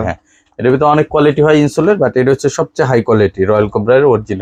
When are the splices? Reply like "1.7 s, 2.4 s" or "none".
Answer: none